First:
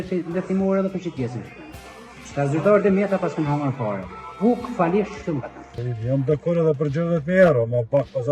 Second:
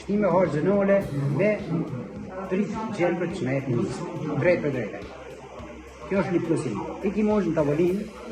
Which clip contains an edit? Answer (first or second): first